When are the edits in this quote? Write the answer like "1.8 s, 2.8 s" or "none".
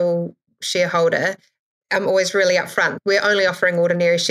2.9 s